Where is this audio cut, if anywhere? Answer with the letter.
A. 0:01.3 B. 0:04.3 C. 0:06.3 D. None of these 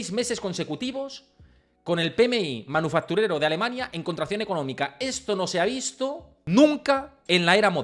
C